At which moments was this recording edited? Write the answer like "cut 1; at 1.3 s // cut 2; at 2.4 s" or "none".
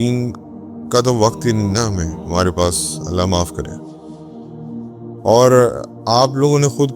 cut 1; at 3.9 s // cut 2; at 5.2 s